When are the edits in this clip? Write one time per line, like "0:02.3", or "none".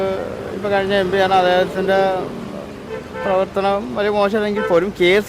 none